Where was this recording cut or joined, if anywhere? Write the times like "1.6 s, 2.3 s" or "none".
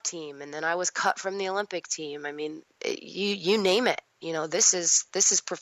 none